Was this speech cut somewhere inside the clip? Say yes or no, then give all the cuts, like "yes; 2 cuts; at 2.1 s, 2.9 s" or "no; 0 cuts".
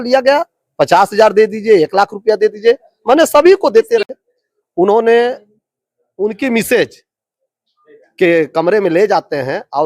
yes; 1 cut; at 4.2 s